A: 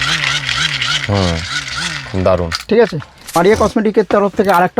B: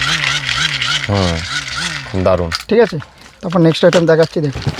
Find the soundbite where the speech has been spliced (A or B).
A